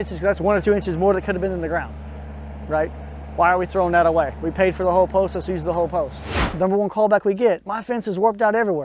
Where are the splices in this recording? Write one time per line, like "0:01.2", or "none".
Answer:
0:06.3